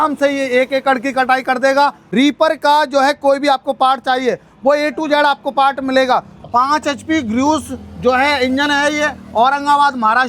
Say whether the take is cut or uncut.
cut